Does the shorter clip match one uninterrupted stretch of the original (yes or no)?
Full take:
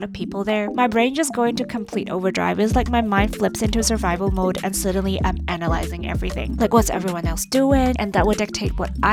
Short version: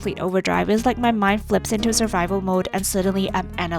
yes